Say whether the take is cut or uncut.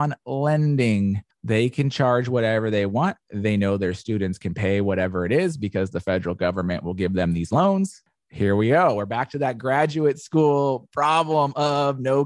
uncut